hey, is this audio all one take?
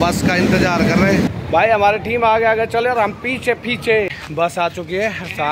no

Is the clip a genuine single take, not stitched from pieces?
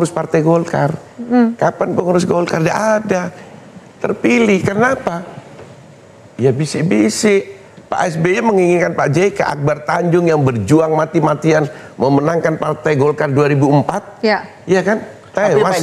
yes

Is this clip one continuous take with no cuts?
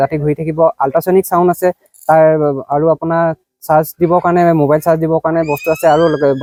yes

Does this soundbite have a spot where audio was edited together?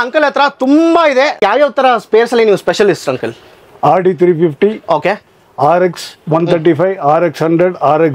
yes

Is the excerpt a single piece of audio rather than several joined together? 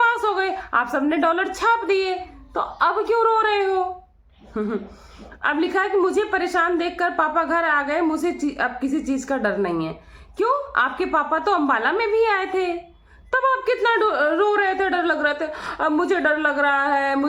yes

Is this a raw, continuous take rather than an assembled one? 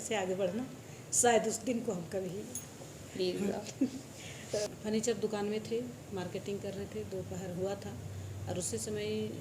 no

